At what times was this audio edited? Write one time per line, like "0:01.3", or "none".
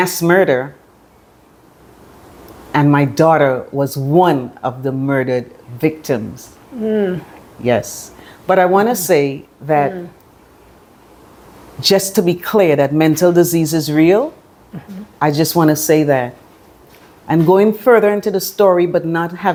none